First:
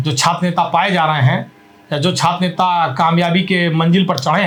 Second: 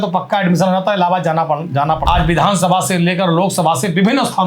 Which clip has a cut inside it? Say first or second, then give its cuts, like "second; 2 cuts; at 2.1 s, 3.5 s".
second; 1 cut; at 2.0 s